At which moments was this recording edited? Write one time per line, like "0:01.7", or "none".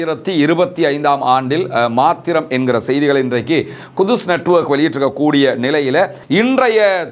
0:06.2